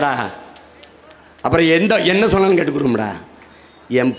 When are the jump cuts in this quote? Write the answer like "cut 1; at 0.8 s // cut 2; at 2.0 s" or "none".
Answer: none